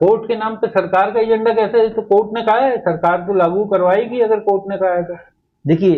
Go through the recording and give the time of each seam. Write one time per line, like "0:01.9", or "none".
none

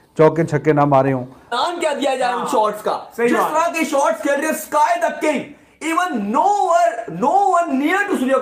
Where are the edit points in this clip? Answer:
0:01.5

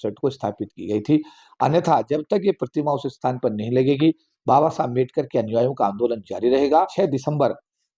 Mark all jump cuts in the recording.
0:06.9

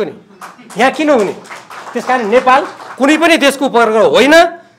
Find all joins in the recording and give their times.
none

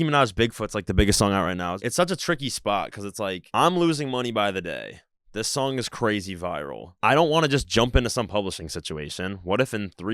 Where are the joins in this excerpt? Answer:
0:01.8

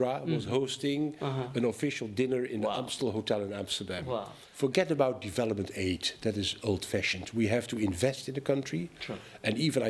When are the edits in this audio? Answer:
0:04.4

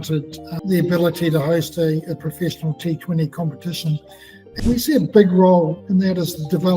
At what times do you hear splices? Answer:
0:04.5
0:05.8

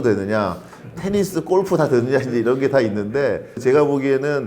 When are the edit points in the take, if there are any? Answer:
0:03.6

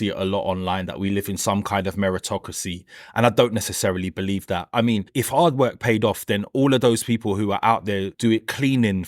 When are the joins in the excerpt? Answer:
0:05.1
0:08.1

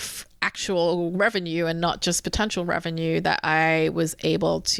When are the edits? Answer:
none

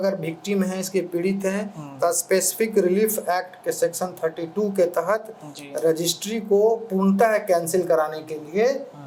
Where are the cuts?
none

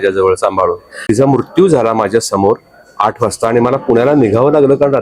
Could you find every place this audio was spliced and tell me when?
0:01.0

